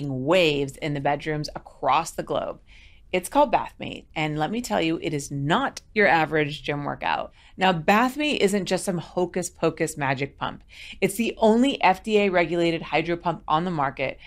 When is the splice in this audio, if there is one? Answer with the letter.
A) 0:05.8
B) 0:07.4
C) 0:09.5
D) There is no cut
B